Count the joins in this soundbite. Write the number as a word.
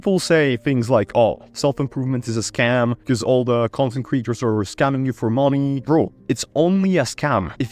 zero